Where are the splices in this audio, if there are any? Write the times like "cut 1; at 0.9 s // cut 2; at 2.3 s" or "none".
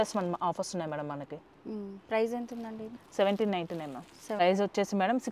cut 1; at 4.4 s